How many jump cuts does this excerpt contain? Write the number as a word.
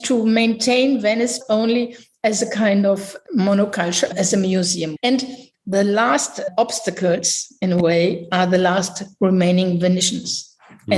two